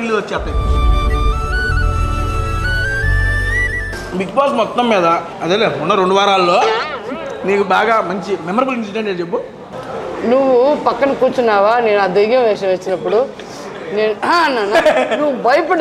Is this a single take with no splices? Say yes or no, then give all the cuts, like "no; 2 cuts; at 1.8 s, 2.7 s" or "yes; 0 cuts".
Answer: no; 2 cuts; at 3.9 s, 5.3 s